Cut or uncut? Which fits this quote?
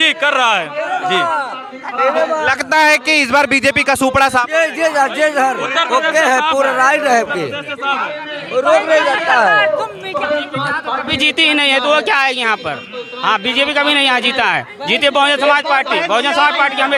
uncut